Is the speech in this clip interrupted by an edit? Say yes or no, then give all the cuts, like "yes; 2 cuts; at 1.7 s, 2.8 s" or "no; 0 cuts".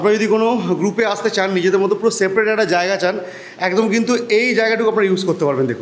no; 0 cuts